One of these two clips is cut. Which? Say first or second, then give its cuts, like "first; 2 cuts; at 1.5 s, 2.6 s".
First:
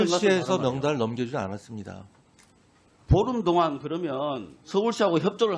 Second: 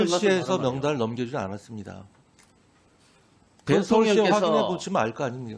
first; 1 cut; at 2.9 s